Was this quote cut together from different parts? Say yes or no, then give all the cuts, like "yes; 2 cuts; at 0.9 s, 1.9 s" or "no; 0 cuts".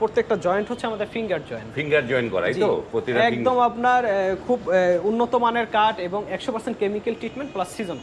no; 0 cuts